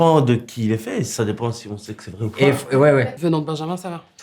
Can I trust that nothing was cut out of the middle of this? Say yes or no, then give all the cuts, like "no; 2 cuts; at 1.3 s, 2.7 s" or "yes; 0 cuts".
no; 1 cut; at 3.1 s